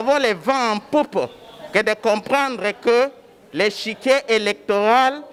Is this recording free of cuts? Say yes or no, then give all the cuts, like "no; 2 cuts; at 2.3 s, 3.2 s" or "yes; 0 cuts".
yes; 0 cuts